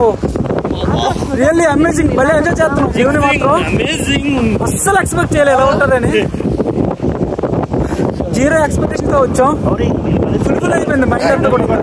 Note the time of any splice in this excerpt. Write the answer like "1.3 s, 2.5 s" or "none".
none